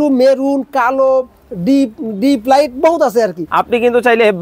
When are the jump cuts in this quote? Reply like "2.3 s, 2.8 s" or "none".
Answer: 3.4 s